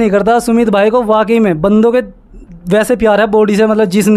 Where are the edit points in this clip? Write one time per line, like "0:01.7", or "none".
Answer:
none